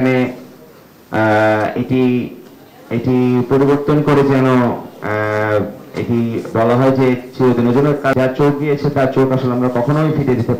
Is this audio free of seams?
no; 1 cut; at 8.1 s

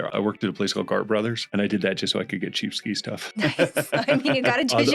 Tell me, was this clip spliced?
yes; 1 cut; at 1.5 s

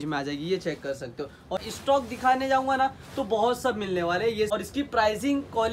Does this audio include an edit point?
yes; 2 cuts; at 1.6 s, 4.5 s

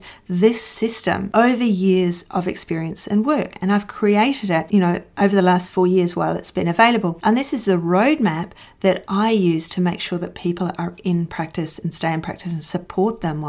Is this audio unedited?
yes; 0 cuts

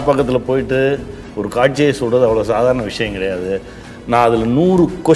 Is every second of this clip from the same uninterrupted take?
yes; 0 cuts

